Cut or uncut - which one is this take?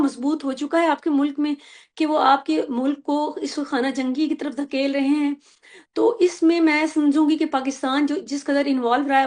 uncut